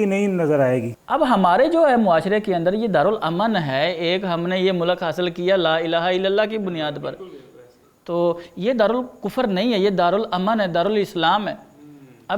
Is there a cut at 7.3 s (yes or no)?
no